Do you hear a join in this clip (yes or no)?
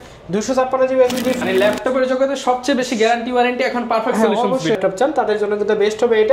yes